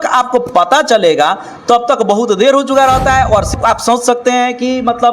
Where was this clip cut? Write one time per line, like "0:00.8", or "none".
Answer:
0:03.5